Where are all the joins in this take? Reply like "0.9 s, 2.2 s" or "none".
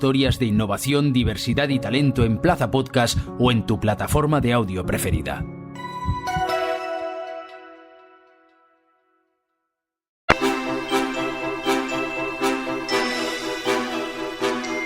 10.3 s